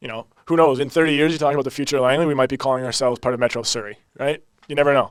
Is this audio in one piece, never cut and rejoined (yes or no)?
yes